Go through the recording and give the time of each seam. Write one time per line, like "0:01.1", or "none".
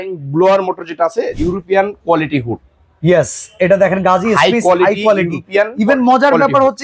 0:01.3